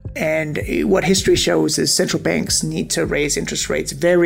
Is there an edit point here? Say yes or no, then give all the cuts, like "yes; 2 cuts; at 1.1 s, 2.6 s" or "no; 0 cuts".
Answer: no; 0 cuts